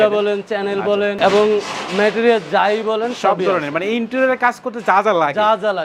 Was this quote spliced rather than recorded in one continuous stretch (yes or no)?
no